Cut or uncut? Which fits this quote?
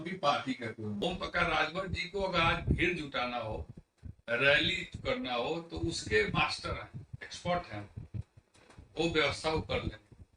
cut